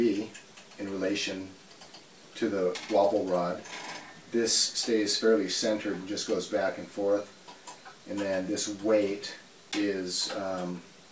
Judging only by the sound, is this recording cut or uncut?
cut